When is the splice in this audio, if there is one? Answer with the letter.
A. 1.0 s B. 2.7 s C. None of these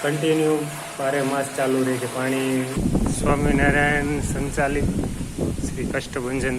B